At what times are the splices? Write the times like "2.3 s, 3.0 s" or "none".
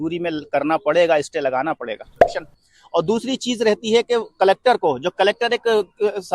2.2 s